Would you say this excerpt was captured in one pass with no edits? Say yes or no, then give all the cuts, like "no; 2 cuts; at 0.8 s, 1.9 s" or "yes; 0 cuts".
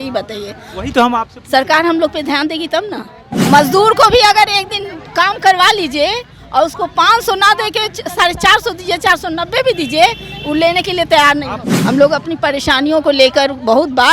no; 2 cuts; at 3.3 s, 11.5 s